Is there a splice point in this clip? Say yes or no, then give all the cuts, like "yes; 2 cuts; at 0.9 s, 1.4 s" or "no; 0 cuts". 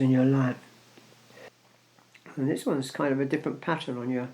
yes; 1 cut; at 1.5 s